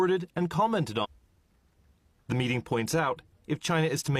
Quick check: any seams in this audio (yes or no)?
no